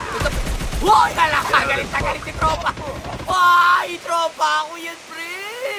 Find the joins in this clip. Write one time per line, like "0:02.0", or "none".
none